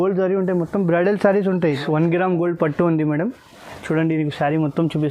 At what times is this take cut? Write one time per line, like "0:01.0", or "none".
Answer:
0:01.8